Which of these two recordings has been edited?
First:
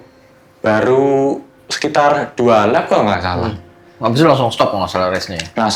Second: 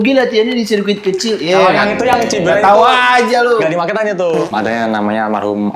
second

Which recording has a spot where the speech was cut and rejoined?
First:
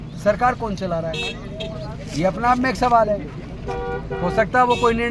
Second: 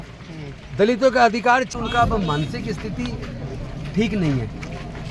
second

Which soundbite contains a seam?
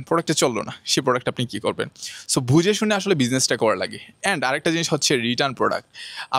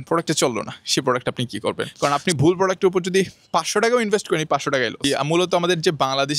second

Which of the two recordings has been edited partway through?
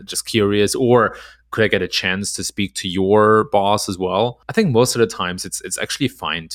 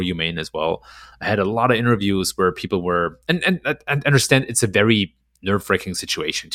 first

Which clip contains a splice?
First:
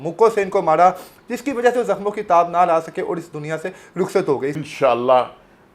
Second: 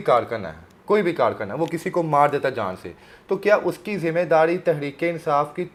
first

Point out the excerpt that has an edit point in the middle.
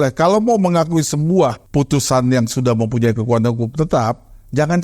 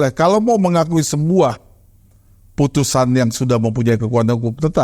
first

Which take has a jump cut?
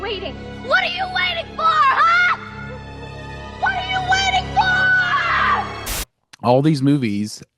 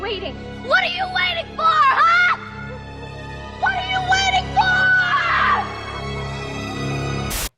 first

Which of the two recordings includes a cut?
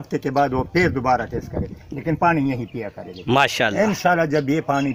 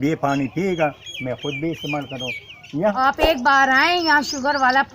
second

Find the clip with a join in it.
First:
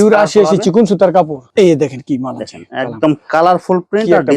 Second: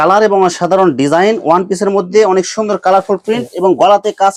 first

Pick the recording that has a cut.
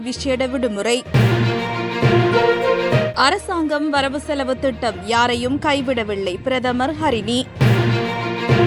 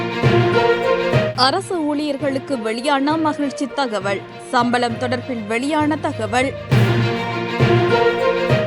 second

